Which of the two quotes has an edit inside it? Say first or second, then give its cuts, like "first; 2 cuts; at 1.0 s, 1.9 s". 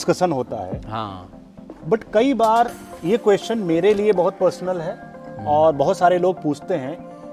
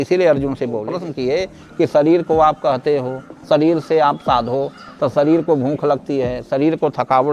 second; 1 cut; at 0.9 s